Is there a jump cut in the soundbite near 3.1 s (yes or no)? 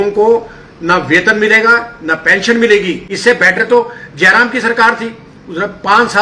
yes